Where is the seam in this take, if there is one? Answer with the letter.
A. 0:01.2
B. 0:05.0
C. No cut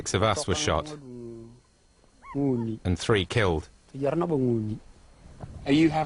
A